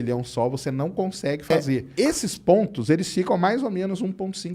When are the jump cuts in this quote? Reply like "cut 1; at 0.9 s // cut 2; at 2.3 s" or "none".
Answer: cut 1; at 1.8 s